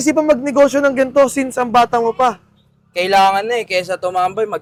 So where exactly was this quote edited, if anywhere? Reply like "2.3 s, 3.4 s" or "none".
none